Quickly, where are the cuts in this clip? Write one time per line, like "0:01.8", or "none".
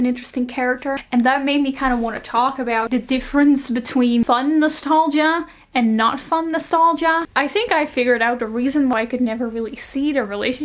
0:01.0
0:02.9
0:04.2
0:07.3
0:08.9

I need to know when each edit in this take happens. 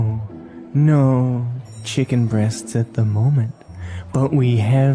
none

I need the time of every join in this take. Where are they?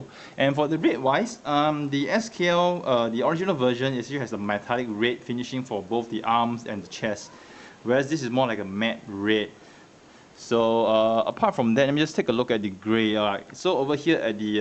none

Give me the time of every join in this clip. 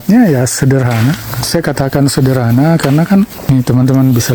0:03.4

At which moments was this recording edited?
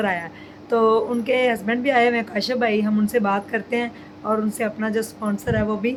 none

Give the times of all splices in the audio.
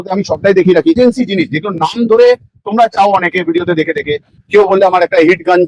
0:01.0

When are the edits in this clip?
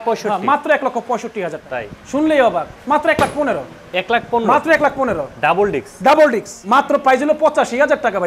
0:01.6
0:06.5

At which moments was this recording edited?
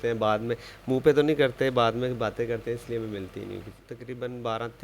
0:03.8

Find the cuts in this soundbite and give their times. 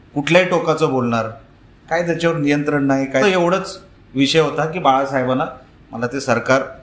0:03.2

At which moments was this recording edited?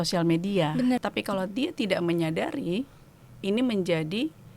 0:01.0

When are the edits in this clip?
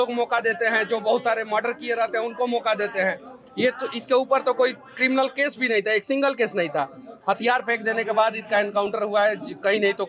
none

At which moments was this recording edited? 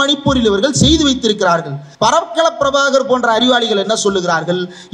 0:01.8

